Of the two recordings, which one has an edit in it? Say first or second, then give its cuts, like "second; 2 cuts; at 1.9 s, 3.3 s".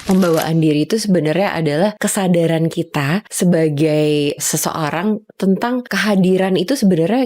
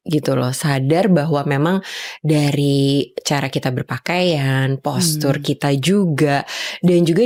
first; 4 cuts; at 2.0 s, 3.3 s, 4.4 s, 5.9 s